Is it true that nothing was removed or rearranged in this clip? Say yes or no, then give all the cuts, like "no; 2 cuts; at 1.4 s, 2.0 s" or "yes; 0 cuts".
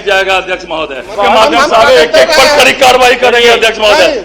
no; 1 cut; at 1.1 s